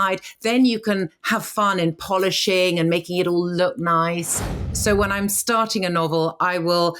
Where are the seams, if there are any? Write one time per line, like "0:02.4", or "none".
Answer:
0:04.7